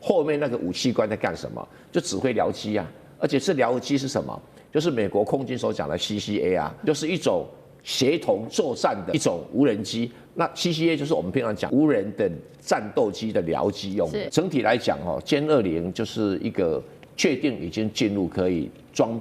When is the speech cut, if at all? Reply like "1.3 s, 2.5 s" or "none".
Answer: 6.7 s, 9.1 s, 11.6 s, 14.3 s